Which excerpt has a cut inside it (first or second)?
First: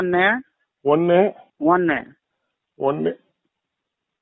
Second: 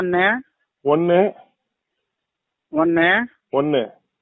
first